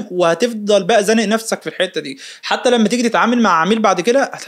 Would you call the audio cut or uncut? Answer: uncut